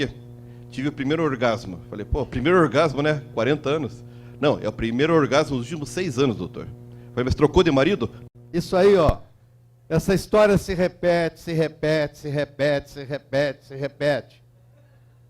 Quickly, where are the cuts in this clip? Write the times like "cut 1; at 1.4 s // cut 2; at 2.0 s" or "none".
cut 1; at 8.2 s